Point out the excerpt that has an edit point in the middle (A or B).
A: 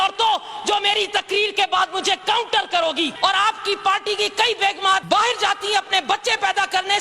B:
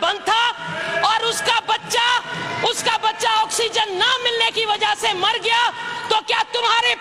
A